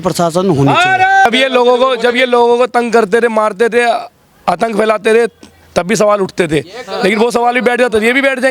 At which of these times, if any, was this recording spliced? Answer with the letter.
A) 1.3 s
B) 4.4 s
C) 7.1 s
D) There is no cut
A